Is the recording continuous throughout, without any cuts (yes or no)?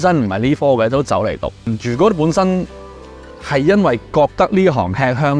no